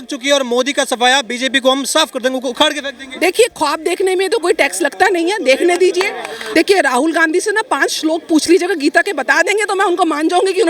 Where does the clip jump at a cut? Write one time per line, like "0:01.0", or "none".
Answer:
0:06.3